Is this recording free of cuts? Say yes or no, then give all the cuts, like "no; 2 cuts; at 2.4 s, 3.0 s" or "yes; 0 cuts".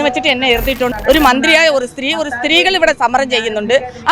no; 1 cut; at 0.9 s